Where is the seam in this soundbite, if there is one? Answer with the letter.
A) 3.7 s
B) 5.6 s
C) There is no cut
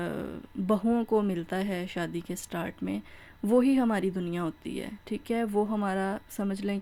C